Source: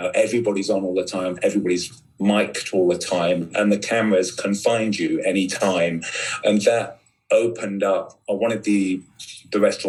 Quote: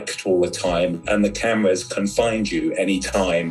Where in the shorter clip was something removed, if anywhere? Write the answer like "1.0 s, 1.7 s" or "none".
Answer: none